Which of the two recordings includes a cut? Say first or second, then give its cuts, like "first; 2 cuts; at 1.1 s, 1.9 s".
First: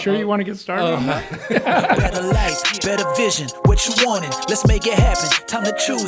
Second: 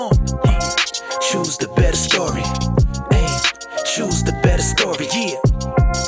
first; 1 cut; at 2.1 s